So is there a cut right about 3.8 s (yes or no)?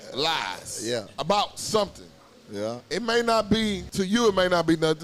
yes